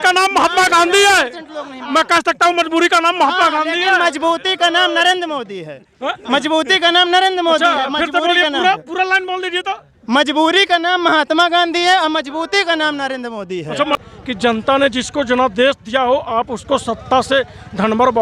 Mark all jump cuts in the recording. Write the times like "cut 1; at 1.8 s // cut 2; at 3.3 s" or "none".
cut 1; at 14.0 s